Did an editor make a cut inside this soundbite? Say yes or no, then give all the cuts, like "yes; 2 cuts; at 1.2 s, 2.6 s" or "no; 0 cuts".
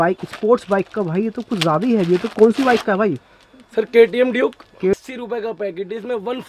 yes; 1 cut; at 4.9 s